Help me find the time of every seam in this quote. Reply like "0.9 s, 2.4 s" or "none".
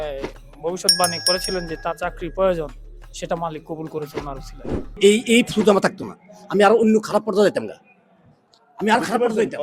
5.0 s

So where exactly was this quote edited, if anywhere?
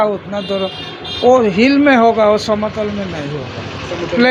none

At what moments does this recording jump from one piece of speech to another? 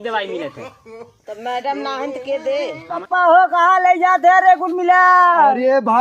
3.0 s

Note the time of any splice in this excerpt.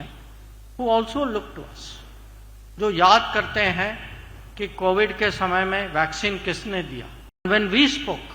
7.4 s

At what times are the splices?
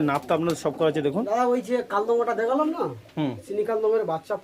1.2 s

